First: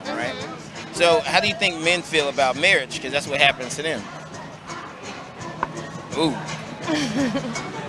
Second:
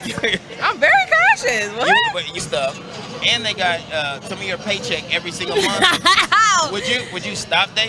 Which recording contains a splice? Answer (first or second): second